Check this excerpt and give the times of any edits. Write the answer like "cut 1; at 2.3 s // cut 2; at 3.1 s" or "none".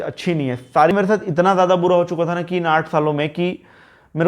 cut 1; at 0.9 s

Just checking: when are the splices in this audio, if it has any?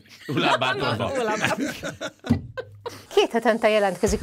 cut 1; at 3.0 s

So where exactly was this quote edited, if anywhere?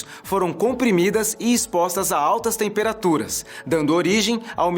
cut 1; at 2.5 s

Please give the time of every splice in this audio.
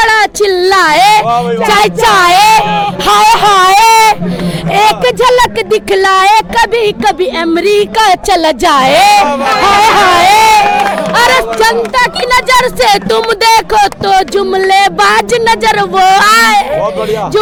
none

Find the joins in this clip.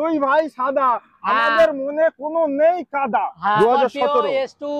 cut 1; at 3.6 s

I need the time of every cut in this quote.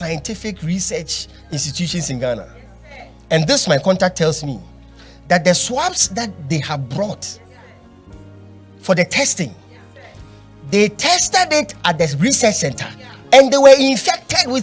none

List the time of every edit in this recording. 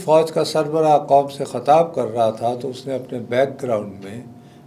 none

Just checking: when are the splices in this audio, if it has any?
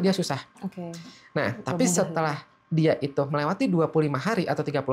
none

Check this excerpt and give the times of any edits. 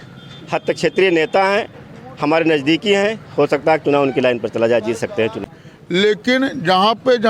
cut 1; at 5.4 s

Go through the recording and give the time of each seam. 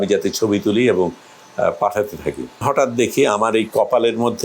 cut 1; at 2.6 s

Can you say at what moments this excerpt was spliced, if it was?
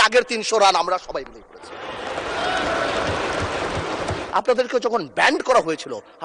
cut 1; at 4.2 s

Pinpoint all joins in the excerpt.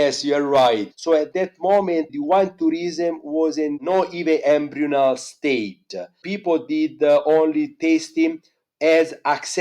cut 1; at 0.9 s // cut 2; at 2.1 s // cut 3; at 3.8 s

